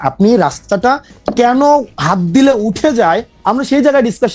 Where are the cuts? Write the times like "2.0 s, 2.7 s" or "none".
none